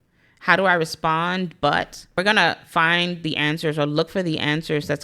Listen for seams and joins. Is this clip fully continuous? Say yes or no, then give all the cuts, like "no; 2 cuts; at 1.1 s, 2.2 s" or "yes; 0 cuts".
no; 1 cut; at 2.2 s